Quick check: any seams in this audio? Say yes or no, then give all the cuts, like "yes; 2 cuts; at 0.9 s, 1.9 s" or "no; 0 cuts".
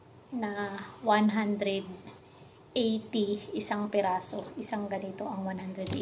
no; 0 cuts